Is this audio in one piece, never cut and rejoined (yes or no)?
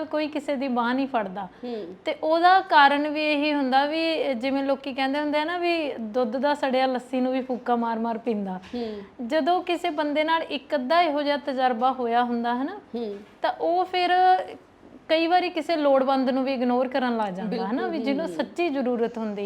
yes